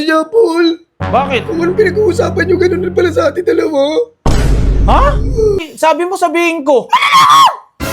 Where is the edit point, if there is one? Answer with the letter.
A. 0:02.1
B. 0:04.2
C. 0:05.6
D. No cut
C